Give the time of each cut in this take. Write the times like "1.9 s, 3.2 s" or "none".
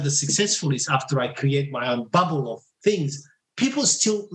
2.6 s